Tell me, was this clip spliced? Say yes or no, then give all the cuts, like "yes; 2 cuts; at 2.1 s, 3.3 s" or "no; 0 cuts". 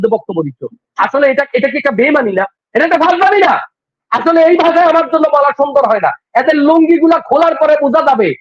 yes; 1 cut; at 2.6 s